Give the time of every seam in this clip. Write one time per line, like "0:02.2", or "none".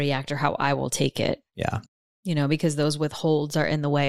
none